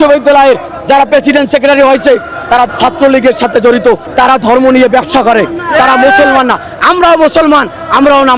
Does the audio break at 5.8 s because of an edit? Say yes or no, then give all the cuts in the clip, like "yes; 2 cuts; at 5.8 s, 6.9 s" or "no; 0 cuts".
no; 2 cuts; at 2.7 s, 4.0 s